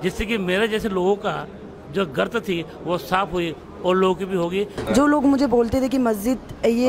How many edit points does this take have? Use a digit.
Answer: 1